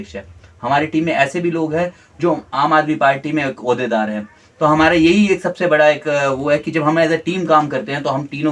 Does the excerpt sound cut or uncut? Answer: uncut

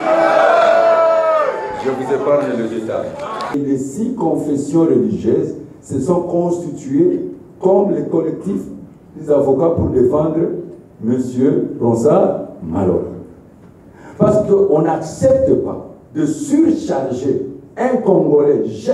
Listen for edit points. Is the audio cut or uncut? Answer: cut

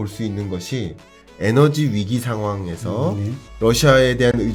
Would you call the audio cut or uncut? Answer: uncut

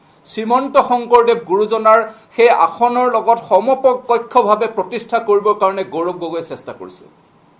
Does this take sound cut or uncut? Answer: uncut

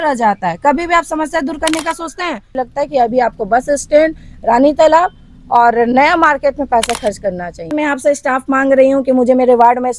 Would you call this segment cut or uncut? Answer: cut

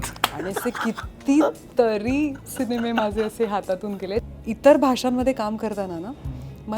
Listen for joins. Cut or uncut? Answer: cut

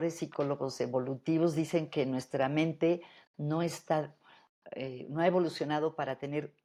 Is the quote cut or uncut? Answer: uncut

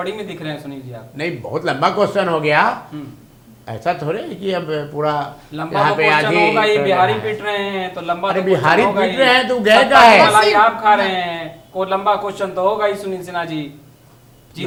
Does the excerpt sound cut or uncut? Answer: uncut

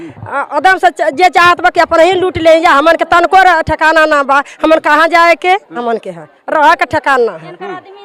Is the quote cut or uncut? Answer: cut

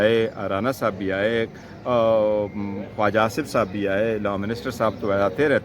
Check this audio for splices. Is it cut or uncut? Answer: uncut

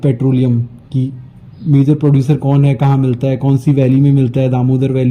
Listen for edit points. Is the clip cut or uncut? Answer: uncut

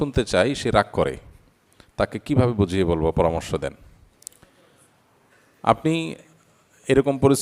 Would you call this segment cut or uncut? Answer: uncut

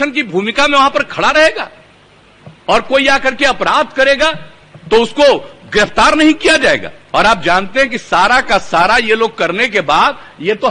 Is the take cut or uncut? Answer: uncut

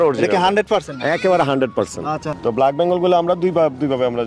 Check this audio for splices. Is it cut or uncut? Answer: cut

